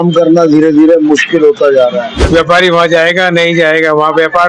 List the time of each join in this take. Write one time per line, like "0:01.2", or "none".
0:02.1